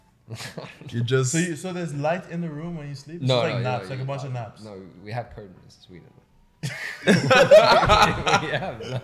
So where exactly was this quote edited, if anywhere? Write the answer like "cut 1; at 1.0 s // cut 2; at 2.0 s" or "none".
none